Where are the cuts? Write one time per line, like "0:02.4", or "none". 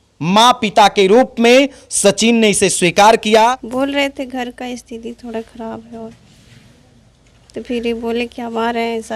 0:03.6